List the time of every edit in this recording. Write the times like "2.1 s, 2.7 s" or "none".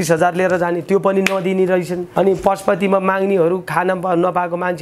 2.0 s